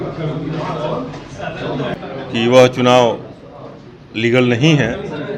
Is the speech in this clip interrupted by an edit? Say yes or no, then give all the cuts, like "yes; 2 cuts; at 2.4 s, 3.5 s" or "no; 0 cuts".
yes; 1 cut; at 2.0 s